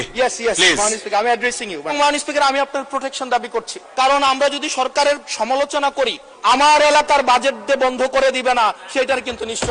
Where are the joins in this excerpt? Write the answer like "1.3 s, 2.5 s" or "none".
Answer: 1.9 s, 3.8 s, 6.3 s